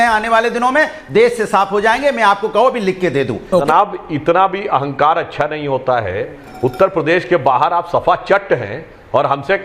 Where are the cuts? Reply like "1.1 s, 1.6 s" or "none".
3.7 s